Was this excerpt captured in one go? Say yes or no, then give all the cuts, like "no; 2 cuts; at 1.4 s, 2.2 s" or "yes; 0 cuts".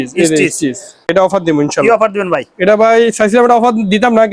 no; 1 cut; at 1.1 s